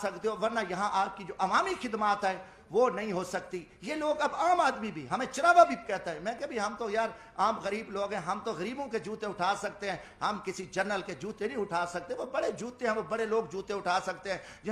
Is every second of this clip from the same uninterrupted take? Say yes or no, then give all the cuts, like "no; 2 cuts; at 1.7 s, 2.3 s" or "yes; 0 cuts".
yes; 0 cuts